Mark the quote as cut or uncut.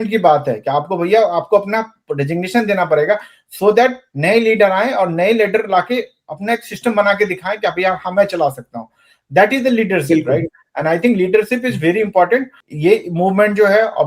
cut